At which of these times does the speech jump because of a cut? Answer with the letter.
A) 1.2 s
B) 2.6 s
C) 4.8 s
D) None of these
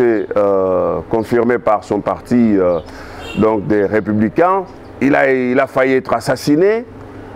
C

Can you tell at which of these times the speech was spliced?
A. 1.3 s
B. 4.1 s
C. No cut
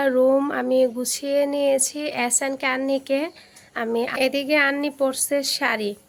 B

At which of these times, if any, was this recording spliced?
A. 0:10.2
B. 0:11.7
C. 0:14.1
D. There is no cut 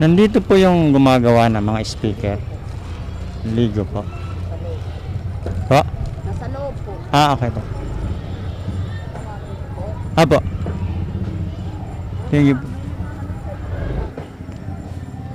C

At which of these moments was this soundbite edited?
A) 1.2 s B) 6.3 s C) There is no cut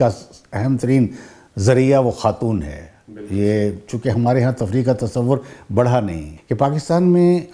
B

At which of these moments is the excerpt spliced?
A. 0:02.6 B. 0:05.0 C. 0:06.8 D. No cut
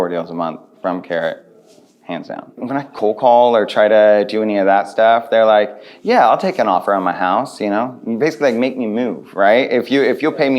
A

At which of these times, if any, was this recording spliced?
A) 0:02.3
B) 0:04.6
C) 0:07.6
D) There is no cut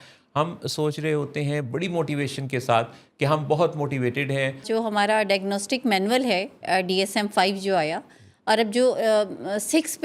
B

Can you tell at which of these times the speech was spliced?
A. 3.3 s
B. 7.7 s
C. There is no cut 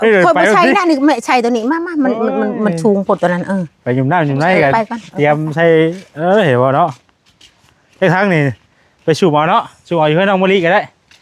C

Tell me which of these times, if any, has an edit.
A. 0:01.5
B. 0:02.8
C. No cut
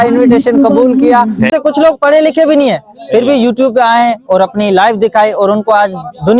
A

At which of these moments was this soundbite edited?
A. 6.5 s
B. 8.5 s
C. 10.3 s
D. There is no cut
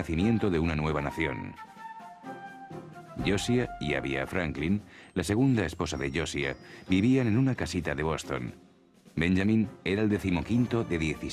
B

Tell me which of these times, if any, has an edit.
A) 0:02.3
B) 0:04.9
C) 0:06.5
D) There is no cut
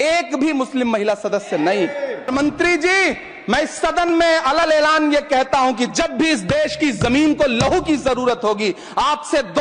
A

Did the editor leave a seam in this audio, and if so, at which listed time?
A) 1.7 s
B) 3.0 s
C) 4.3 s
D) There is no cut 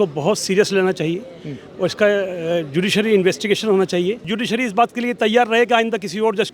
C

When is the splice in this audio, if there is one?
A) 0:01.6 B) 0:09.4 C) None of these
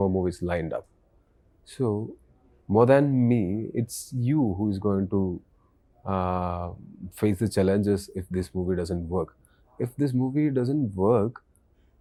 C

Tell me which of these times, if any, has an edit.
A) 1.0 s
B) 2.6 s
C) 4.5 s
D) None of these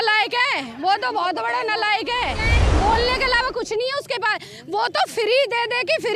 B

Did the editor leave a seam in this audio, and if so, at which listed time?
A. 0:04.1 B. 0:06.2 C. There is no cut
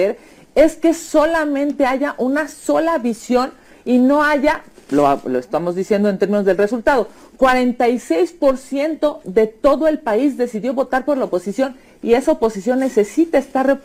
C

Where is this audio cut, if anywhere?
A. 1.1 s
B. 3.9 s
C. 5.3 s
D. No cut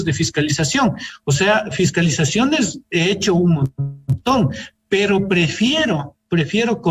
A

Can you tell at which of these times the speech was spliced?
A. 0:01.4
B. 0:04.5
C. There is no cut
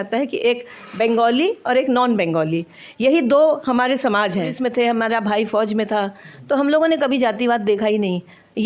B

